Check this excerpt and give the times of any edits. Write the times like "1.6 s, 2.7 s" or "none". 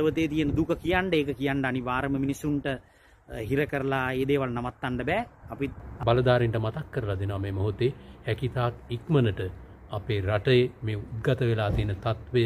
5.9 s